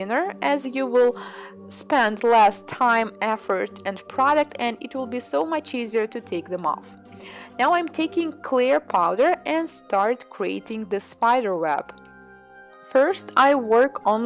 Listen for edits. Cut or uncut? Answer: cut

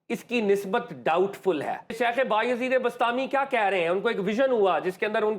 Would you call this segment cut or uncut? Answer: cut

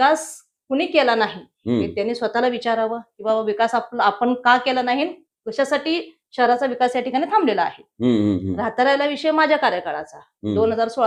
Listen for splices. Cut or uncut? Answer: uncut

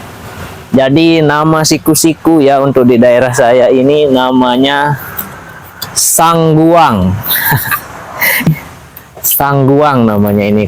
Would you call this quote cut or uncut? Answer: cut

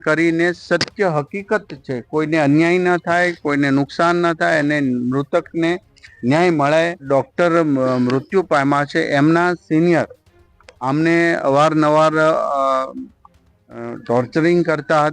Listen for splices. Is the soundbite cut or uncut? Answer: cut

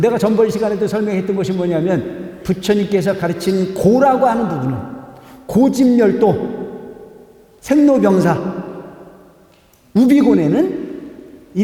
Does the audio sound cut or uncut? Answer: uncut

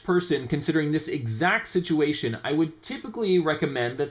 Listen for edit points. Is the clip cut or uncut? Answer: uncut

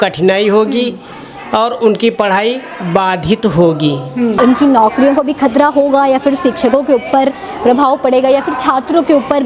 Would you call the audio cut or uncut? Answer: cut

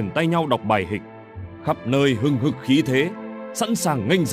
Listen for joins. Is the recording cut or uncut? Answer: uncut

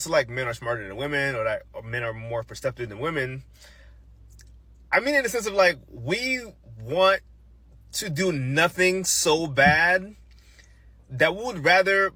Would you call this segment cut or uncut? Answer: uncut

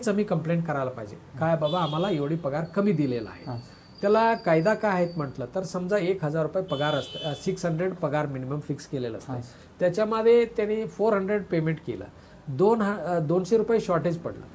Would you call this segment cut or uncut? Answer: uncut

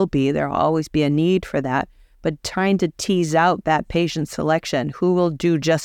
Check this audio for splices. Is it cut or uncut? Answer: uncut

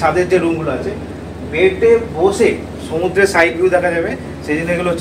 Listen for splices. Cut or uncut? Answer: uncut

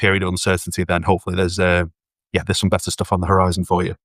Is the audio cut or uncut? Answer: uncut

